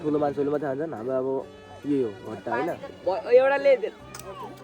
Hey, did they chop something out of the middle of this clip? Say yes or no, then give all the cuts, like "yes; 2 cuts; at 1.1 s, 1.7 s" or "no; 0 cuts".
yes; 1 cut; at 2.9 s